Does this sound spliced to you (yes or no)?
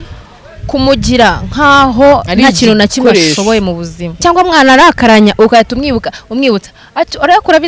yes